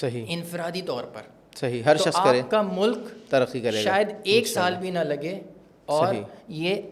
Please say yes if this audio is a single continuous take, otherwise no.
yes